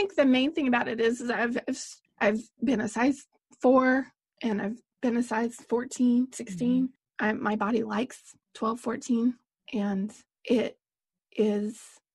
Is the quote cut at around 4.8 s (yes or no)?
yes